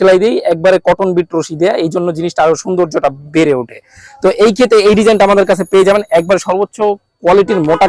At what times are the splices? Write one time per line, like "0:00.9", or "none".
none